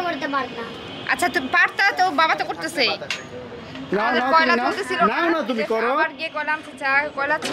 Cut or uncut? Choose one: uncut